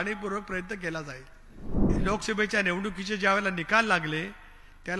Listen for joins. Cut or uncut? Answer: cut